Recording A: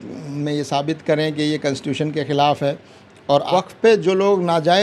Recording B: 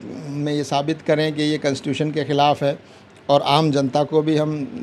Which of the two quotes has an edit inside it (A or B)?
A